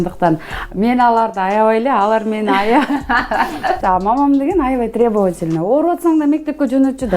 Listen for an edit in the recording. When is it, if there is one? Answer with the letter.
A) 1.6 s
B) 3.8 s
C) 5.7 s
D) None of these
B